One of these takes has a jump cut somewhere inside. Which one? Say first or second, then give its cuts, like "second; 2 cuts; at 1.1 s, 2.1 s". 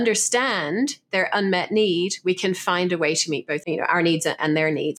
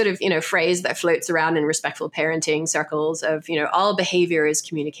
first; 1 cut; at 3.6 s